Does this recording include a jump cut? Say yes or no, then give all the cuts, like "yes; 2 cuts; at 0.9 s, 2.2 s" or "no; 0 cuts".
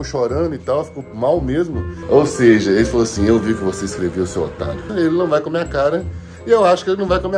yes; 2 cuts; at 1.9 s, 4.9 s